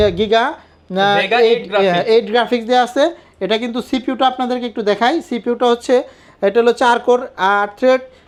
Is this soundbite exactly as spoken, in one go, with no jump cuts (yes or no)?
yes